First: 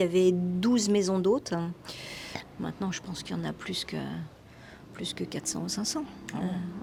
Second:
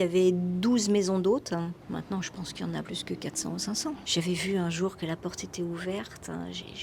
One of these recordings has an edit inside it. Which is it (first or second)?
second